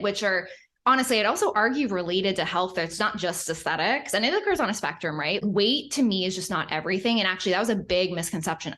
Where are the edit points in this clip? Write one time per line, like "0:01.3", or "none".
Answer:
0:05.4